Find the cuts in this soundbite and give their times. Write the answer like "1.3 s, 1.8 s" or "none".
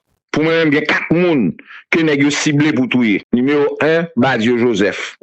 3.2 s